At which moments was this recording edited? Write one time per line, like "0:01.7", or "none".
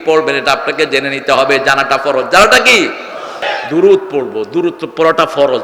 0:03.5